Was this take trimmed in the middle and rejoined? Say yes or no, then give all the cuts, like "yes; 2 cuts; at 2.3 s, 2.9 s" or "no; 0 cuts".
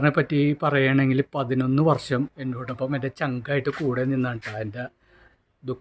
no; 0 cuts